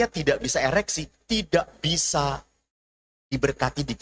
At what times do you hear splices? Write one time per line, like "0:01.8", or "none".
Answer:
none